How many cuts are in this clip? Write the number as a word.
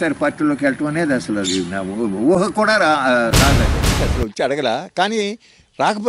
one